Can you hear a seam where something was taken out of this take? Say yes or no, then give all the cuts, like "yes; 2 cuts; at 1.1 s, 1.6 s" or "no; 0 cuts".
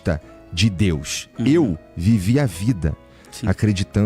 no; 0 cuts